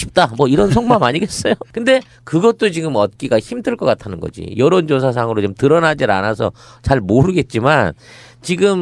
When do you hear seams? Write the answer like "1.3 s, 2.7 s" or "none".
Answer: 1.0 s